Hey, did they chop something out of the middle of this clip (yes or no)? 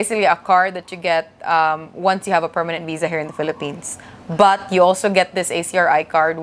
no